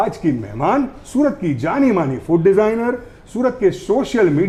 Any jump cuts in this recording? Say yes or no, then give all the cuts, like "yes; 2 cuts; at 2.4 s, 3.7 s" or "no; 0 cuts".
no; 0 cuts